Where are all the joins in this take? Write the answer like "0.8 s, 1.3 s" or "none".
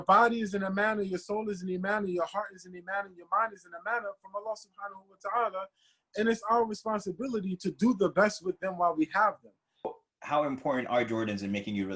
10.0 s